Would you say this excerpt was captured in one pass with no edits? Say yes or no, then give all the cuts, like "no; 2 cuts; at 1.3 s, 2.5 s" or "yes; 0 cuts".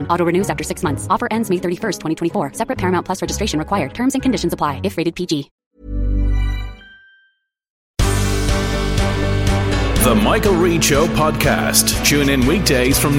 no; 2 cuts; at 5.6 s, 7.8 s